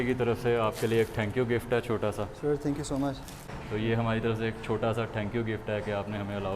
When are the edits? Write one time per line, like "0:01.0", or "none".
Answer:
0:03.5